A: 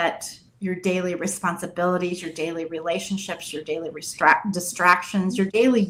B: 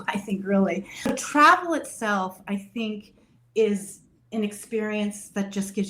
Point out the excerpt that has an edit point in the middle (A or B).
B